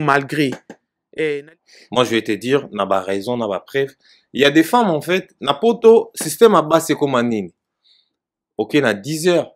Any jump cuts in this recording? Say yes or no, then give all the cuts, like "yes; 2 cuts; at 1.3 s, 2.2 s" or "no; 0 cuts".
yes; 1 cut; at 1.4 s